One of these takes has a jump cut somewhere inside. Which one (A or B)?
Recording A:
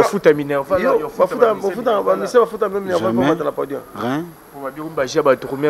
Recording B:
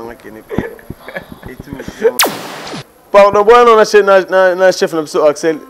B